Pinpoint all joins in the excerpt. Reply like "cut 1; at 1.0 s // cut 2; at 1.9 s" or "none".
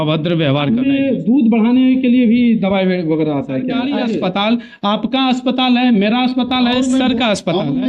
cut 1; at 0.9 s // cut 2; at 3.9 s